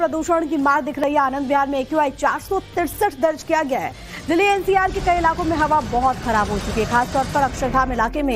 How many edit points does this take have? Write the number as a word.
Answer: one